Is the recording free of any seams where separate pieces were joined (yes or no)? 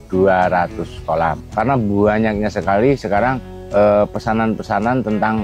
no